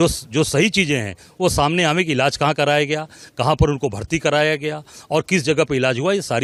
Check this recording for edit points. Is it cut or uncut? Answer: uncut